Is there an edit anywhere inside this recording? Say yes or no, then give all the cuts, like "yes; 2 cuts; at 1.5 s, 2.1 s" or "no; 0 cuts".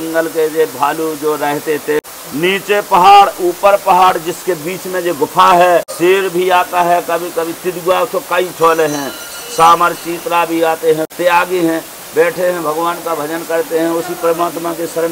yes; 3 cuts; at 2.0 s, 5.9 s, 11.1 s